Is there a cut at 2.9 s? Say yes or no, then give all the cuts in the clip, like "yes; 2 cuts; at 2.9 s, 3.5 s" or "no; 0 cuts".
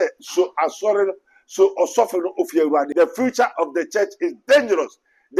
yes; 1 cut; at 2.9 s